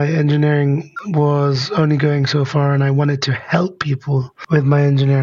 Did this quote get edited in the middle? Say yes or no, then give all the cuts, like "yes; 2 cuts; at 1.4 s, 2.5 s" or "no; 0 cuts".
no; 0 cuts